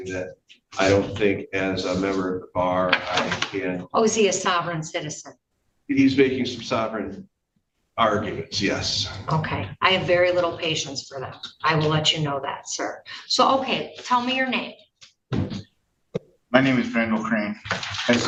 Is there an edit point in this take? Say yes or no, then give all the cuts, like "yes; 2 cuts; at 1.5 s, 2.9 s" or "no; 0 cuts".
no; 0 cuts